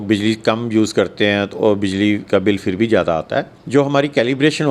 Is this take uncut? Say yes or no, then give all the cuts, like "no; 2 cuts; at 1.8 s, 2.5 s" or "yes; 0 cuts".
no; 1 cut; at 3.6 s